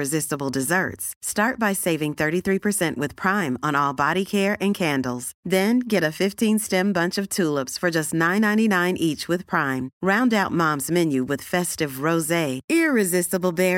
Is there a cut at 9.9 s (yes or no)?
no